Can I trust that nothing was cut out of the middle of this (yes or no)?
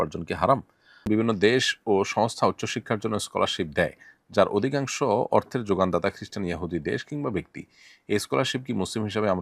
no